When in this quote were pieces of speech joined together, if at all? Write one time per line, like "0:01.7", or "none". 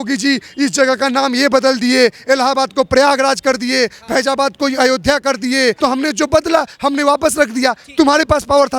0:05.8